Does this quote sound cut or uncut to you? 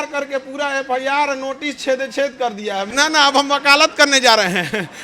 cut